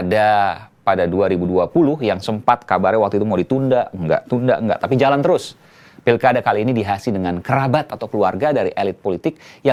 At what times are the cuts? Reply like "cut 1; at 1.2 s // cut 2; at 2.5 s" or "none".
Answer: none